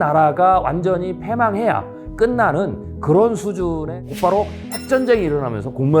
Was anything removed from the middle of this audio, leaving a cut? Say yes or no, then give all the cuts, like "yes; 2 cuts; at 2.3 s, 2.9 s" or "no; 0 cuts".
yes; 1 cut; at 4.0 s